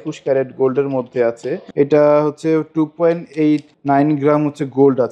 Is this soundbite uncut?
no; 1 cut; at 1.5 s

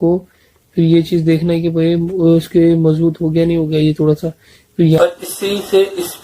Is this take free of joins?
no; 1 cut; at 5.0 s

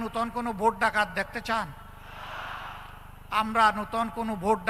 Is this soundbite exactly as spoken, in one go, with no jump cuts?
yes; 0 cuts

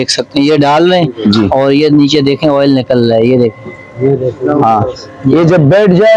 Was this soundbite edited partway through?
no; 0 cuts

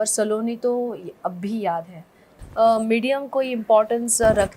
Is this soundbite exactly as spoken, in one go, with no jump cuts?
no; 1 cut; at 2.4 s

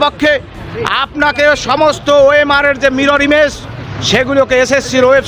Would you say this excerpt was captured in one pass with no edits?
yes; 0 cuts

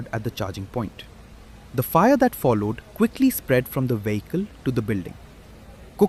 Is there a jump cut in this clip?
no; 0 cuts

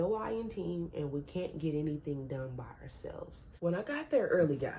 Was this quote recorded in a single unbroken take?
no; 1 cut; at 3.6 s

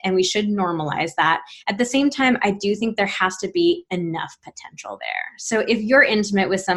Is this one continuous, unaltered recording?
yes; 0 cuts

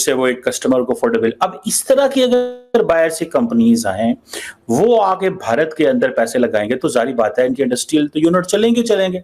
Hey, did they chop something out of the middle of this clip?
no; 0 cuts

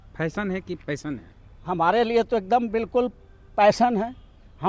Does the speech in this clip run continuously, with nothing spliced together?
yes; 0 cuts

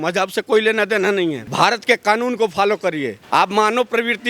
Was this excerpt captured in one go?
no; 2 cuts; at 1.4 s, 3.2 s

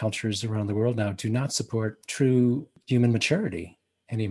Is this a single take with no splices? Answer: no; 2 cuts; at 2.0 s, 2.7 s

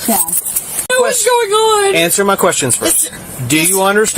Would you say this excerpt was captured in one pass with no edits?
no; 1 cut; at 0.9 s

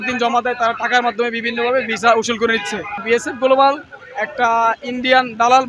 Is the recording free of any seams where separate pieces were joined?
no; 1 cut; at 3.0 s

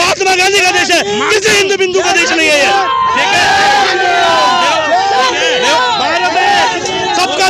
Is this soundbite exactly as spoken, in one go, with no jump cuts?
yes; 0 cuts

